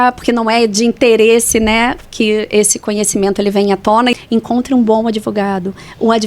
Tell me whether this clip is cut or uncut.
cut